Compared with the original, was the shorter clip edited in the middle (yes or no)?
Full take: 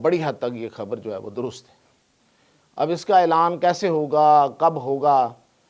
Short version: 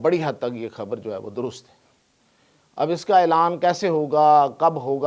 no